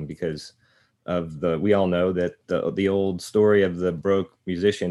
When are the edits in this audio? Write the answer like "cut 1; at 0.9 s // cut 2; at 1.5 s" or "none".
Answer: cut 1; at 4.0 s

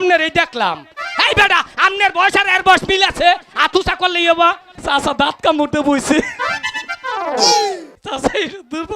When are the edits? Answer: cut 1; at 4.7 s // cut 2; at 7.9 s

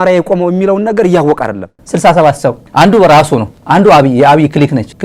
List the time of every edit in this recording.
cut 1; at 1.8 s // cut 2; at 2.6 s // cut 3; at 3.5 s

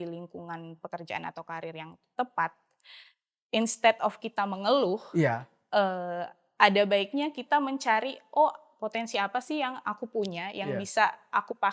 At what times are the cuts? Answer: none

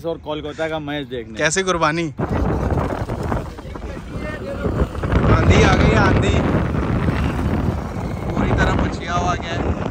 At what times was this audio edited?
cut 1; at 2.1 s

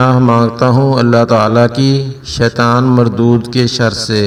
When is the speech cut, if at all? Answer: none

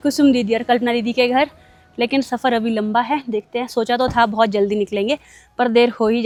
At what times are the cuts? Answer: none

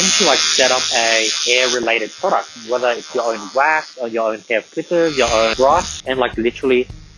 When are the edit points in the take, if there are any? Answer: cut 1; at 1.4 s // cut 2; at 3.9 s // cut 3; at 5.7 s

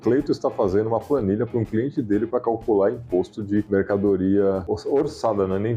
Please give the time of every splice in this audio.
cut 1; at 3.7 s // cut 2; at 4.6 s

